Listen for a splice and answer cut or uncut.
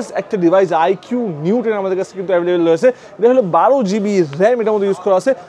uncut